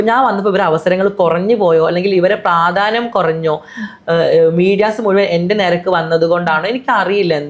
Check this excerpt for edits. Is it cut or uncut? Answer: uncut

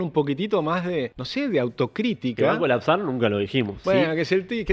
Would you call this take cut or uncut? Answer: cut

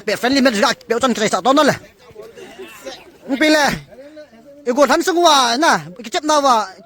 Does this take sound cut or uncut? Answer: uncut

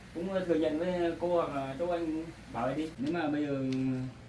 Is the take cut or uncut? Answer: cut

